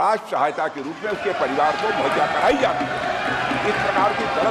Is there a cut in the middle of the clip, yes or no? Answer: no